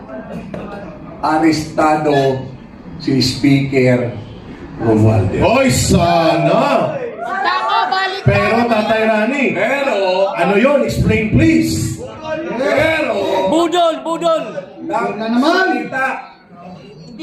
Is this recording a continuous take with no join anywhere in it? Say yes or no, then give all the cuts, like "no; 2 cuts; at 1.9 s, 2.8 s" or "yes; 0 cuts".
yes; 0 cuts